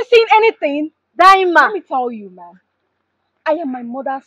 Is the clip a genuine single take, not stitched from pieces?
yes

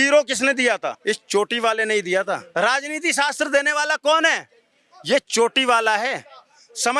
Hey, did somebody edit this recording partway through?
yes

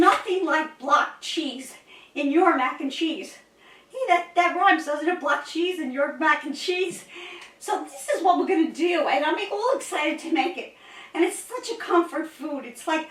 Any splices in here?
no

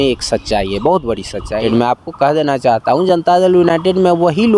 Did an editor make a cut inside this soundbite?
yes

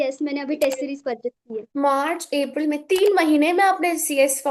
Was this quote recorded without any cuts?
no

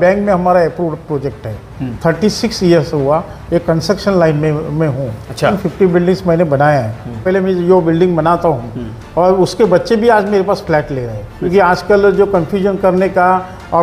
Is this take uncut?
no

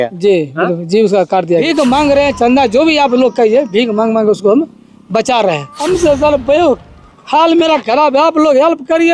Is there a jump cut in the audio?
yes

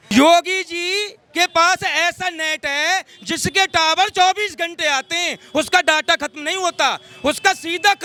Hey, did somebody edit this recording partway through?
no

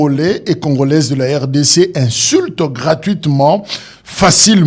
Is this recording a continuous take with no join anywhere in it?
yes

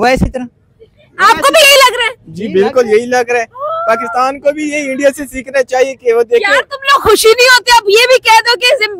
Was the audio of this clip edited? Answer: no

